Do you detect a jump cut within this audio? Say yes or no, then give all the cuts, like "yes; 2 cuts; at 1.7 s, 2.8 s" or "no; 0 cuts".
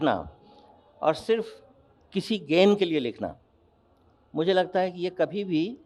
no; 0 cuts